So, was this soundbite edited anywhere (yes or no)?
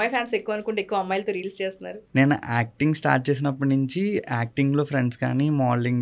yes